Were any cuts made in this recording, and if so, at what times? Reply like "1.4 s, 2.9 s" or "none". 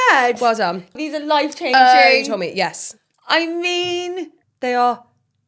1.0 s, 4.4 s